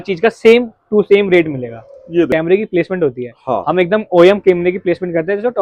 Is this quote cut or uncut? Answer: cut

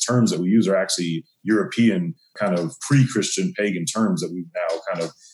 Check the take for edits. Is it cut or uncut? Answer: cut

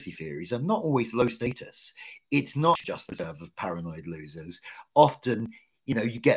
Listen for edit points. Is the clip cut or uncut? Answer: cut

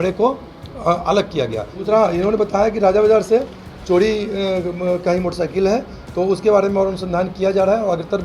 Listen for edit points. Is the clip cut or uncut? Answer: cut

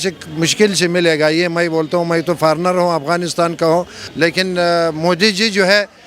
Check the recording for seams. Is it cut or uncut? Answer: cut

